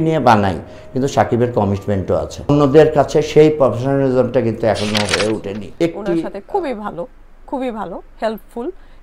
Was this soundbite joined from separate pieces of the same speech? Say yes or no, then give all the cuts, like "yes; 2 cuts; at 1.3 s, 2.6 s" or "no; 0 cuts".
yes; 1 cut; at 6.1 s